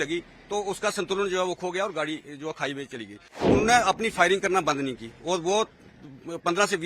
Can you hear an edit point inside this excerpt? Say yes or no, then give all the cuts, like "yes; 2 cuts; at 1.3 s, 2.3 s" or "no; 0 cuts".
yes; 1 cut; at 3.4 s